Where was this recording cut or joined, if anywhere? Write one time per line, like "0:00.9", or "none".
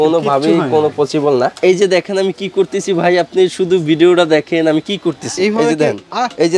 0:01.5